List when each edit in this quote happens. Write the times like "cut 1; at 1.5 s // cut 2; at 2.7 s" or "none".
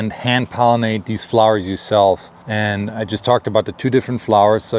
cut 1; at 2.4 s